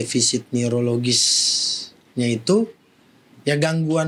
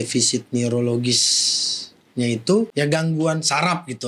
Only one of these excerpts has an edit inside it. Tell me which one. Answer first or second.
second